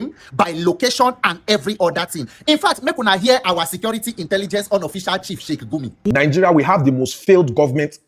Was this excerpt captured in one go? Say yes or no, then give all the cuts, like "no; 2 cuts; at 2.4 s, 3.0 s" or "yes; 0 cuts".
no; 1 cut; at 6.1 s